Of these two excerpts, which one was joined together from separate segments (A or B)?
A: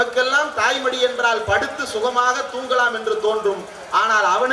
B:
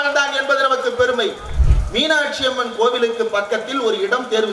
B